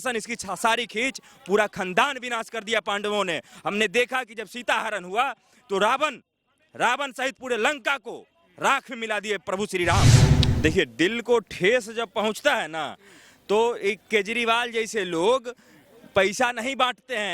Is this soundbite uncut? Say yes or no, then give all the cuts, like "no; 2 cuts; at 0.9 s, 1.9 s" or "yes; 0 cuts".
no; 1 cut; at 10.2 s